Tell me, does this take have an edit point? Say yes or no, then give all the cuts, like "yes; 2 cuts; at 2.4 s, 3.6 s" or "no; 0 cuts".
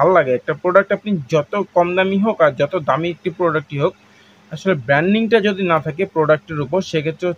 no; 0 cuts